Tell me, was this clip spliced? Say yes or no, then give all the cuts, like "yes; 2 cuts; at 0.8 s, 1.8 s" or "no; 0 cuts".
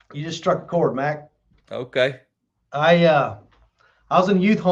no; 0 cuts